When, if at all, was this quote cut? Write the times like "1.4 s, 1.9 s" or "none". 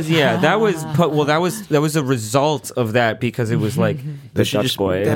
4.2 s